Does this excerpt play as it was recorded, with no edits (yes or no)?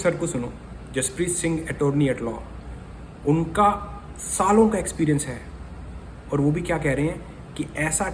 yes